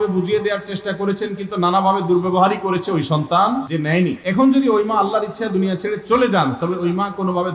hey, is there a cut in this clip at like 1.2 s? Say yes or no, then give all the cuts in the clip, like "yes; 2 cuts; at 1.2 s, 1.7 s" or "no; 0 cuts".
no; 1 cut; at 3.9 s